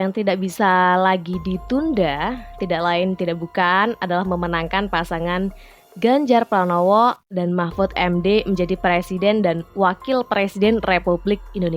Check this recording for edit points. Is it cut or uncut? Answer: uncut